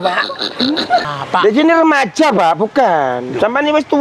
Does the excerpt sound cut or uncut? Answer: cut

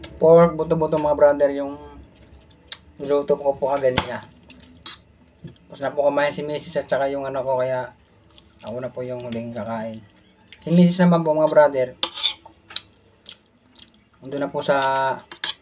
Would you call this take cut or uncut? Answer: uncut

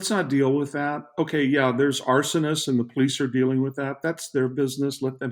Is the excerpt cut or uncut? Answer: uncut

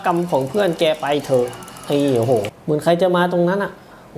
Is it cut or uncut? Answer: cut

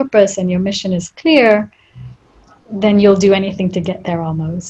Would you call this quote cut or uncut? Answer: uncut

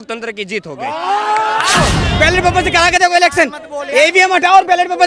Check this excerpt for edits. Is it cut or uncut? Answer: cut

